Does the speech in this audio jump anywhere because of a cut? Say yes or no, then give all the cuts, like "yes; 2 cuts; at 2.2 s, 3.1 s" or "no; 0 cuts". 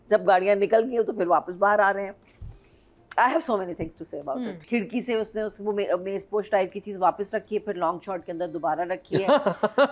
yes; 1 cut; at 4.5 s